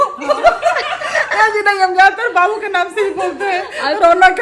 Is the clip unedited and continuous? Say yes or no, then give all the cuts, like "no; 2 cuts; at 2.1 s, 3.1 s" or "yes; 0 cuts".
yes; 0 cuts